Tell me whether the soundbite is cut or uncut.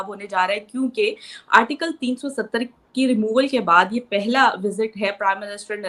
uncut